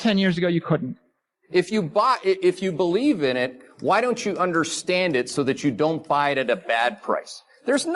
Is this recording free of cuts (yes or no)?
no